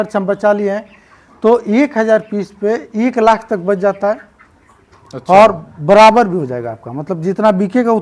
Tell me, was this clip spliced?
no; 0 cuts

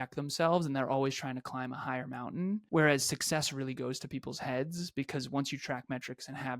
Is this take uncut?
no; 1 cut; at 2.6 s

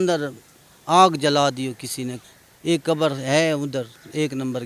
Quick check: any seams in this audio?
yes; 1 cut; at 2.2 s

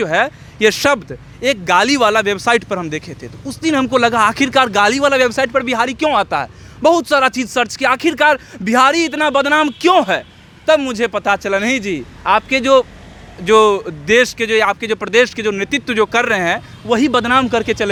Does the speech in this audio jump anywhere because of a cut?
no; 0 cuts

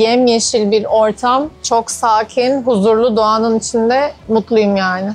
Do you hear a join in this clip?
no; 0 cuts

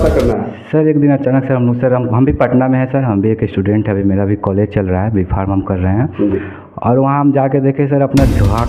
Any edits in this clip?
no; 0 cuts

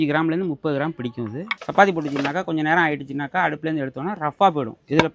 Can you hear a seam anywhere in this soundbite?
yes; 1 cut; at 1.5 s

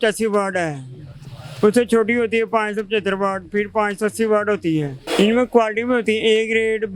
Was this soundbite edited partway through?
yes; 1 cut; at 5.0 s

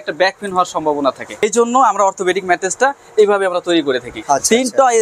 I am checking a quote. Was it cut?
yes; 2 cuts; at 1.4 s, 4.1 s

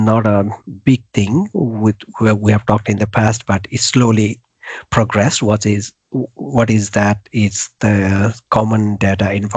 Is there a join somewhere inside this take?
no; 0 cuts

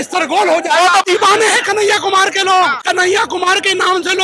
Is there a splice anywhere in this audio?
yes; 2 cuts; at 1.0 s, 2.8 s

